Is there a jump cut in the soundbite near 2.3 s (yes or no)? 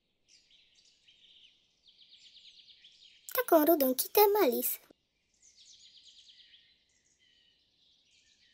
yes